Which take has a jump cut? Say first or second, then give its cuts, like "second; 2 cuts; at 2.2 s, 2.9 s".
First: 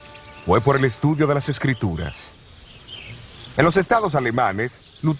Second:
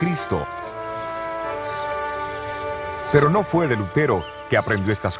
second; 1 cut; at 2.6 s